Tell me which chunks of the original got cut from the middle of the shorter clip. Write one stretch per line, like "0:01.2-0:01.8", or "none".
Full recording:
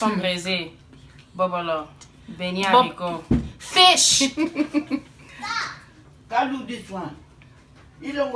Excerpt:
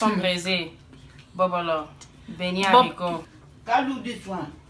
0:03.2-0:05.8

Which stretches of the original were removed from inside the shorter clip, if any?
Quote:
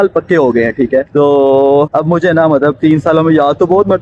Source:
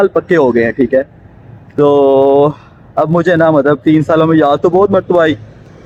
0:01.1-0:01.7
0:02.6-0:03.0

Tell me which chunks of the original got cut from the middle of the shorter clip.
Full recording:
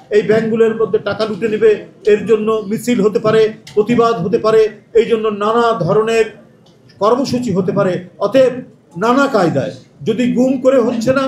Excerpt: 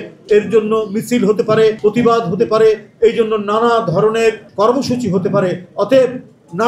0:03.5-0:03.7
0:06.4-0:06.9

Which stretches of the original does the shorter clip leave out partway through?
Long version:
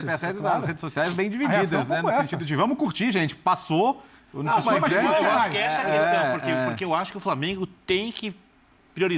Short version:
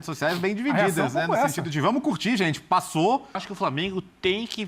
0:04.2-0:07.1

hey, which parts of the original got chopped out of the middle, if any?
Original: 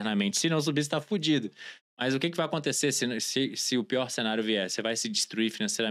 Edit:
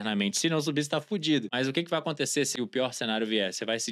0:01.5-0:02.0
0:03.0-0:03.7

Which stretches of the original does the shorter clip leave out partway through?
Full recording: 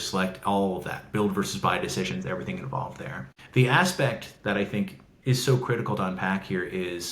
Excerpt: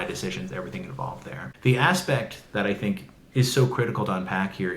0:03.2-0:03.4

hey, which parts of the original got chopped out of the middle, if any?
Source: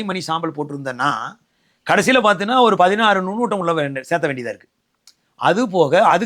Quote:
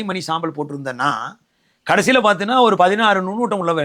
none

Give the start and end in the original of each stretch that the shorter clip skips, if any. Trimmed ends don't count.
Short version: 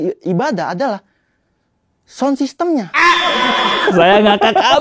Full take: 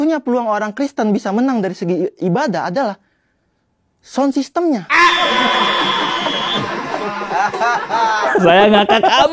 0:05.8-0:08.3

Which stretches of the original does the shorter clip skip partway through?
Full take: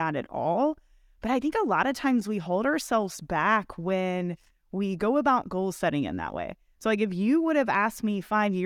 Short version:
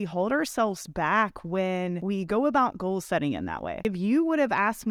0:04.3-0:04.7
0:06.5-0:07.0

